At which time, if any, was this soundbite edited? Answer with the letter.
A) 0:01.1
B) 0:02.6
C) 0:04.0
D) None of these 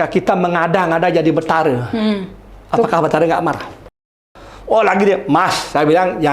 C